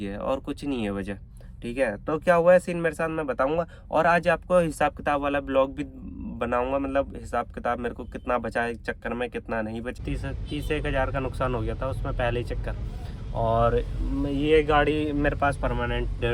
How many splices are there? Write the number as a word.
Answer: one